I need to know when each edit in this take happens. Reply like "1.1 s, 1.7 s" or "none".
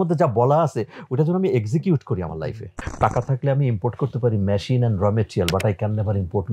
2.8 s